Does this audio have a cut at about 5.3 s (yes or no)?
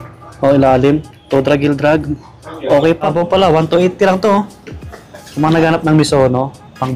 no